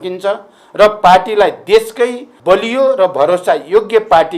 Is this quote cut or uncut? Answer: cut